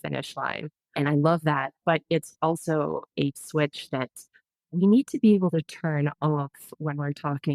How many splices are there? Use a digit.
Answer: 1